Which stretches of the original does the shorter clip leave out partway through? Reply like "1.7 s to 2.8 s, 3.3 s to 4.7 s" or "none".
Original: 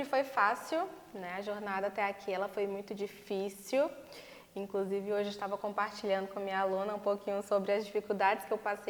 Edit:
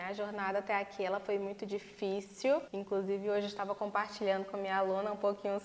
4.0 s to 4.6 s